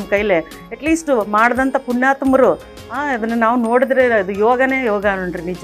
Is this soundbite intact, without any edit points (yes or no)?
yes